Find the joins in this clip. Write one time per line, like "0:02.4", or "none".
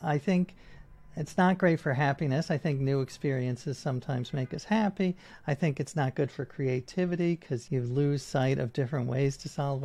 0:07.5